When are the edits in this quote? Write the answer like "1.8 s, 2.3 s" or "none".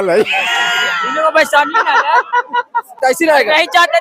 3.0 s